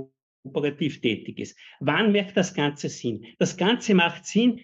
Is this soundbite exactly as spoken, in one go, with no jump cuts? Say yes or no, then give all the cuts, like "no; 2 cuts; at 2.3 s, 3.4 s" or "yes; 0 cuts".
yes; 0 cuts